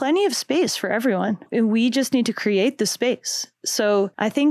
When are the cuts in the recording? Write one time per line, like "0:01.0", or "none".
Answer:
0:01.4